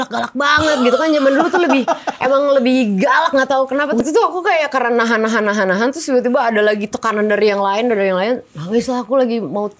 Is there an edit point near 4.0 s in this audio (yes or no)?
yes